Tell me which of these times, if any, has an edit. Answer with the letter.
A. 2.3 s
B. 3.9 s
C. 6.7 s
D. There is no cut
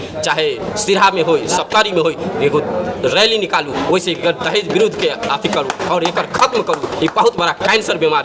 D